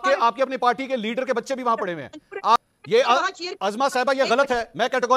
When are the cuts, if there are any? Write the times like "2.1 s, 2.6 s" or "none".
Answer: 2.7 s